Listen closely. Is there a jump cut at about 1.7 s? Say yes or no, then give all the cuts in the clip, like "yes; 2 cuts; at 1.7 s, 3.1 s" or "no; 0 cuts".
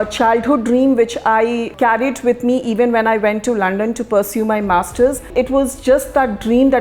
yes; 2 cuts; at 1.7 s, 5.3 s